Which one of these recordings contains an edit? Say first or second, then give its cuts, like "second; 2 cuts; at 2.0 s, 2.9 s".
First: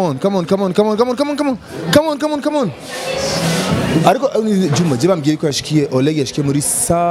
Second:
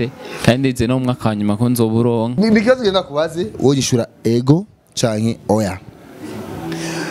second; 1 cut; at 2.4 s